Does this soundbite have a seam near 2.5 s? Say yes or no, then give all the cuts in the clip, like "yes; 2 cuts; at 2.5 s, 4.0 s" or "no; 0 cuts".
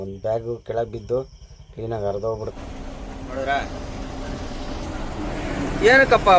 yes; 1 cut; at 2.5 s